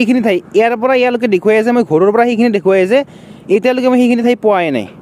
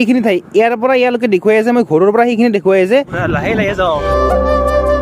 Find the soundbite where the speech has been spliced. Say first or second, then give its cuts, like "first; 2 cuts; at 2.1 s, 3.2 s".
second; 2 cuts; at 3.2 s, 4.0 s